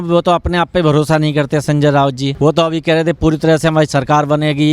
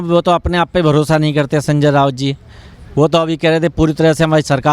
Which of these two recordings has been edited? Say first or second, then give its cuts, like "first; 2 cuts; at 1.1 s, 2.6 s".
first; 1 cut; at 2.3 s